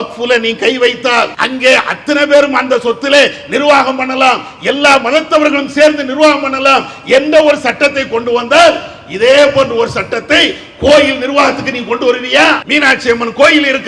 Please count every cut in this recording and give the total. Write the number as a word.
two